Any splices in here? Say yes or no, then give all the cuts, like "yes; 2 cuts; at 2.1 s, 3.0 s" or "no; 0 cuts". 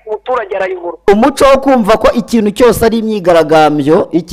yes; 1 cut; at 1.0 s